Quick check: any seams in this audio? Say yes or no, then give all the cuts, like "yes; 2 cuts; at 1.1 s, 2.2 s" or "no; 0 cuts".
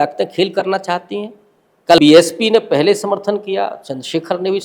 yes; 1 cut; at 2.0 s